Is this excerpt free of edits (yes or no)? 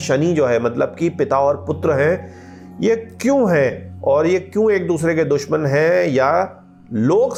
yes